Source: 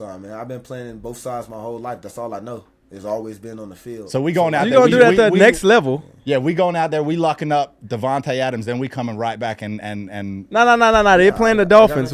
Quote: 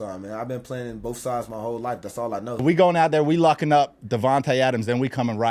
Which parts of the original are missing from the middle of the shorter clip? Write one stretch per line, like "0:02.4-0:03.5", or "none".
0:02.6-0:06.4